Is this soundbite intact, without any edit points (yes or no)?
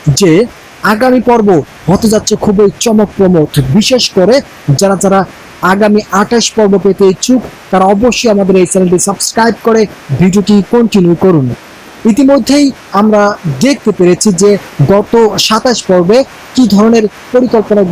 no